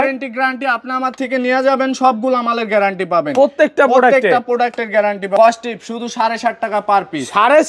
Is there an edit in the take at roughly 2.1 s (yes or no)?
no